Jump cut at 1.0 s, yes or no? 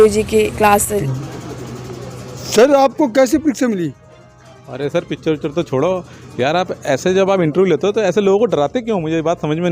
yes